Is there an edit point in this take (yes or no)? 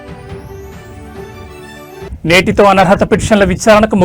no